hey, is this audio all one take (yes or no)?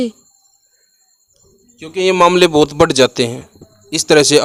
yes